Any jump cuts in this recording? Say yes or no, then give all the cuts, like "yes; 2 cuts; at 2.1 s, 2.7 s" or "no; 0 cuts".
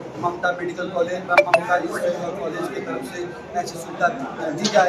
no; 0 cuts